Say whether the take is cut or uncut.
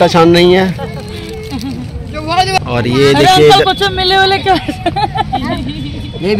cut